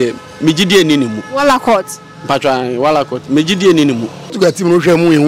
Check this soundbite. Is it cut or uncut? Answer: cut